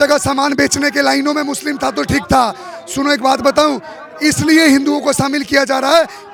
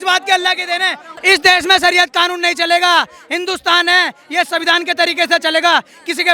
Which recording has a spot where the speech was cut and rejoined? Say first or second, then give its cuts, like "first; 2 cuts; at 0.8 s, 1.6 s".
second; 1 cut; at 1.1 s